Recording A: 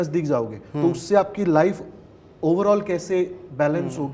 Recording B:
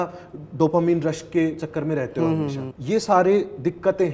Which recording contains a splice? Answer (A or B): B